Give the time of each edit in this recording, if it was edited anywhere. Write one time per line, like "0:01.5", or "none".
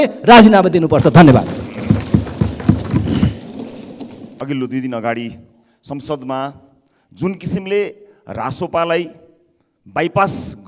none